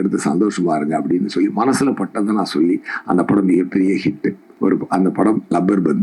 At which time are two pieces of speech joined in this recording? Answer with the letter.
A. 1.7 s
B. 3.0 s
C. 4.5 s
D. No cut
C